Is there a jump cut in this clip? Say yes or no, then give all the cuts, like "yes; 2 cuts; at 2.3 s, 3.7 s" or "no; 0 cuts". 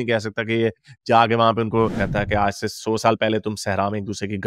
yes; 1 cut; at 1.9 s